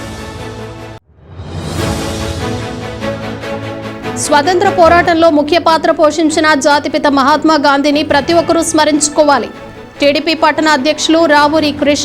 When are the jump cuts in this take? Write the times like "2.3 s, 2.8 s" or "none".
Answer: 1.0 s, 4.2 s